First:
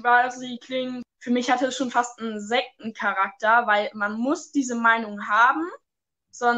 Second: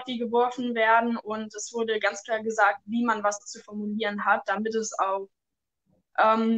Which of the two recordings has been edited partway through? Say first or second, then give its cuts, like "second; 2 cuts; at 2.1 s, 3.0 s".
first; 1 cut; at 1.1 s